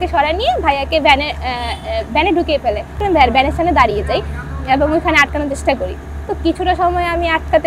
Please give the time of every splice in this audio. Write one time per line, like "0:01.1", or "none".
0:03.0